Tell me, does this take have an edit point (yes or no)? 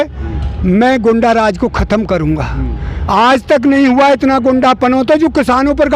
no